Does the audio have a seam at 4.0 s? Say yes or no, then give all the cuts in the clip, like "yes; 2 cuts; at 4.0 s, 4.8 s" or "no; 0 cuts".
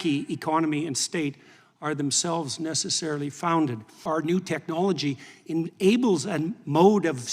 yes; 1 cut; at 4.0 s